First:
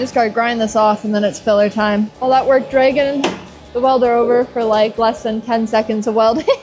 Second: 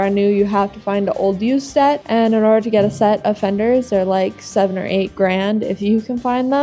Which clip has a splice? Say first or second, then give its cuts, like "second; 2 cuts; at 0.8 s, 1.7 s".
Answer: second; 1 cut; at 2.0 s